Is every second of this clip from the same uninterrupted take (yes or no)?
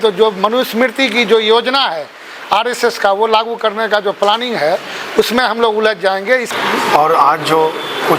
no